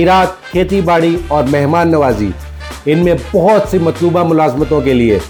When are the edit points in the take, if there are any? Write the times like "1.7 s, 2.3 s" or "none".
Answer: none